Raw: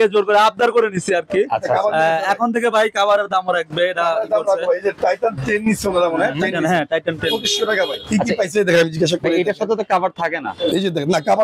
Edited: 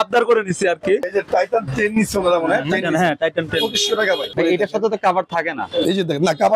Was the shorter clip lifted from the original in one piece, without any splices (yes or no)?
no